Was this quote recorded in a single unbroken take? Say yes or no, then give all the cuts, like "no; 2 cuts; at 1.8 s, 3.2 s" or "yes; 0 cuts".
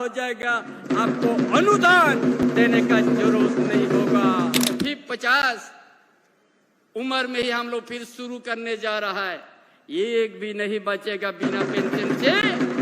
no; 1 cut; at 4.8 s